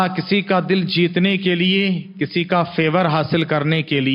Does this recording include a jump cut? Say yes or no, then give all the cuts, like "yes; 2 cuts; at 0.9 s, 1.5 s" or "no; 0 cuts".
no; 0 cuts